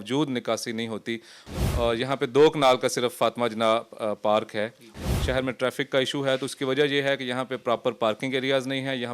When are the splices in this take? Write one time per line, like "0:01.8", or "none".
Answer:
0:01.3
0:05.0